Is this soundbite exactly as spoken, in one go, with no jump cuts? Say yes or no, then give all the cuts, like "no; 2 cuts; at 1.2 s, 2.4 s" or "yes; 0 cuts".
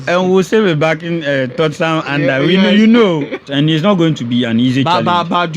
no; 1 cut; at 3.4 s